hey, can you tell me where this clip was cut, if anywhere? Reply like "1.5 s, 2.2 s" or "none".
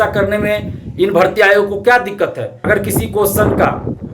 2.5 s